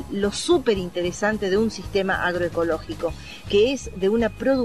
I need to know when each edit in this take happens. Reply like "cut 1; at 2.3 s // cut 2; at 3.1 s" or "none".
none